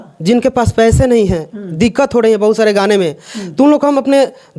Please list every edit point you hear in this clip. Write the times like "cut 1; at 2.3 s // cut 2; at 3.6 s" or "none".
none